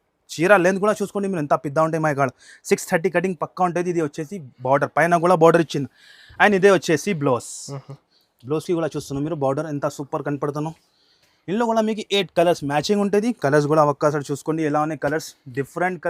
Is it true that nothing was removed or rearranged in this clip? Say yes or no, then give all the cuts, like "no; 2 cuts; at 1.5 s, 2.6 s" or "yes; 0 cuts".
yes; 0 cuts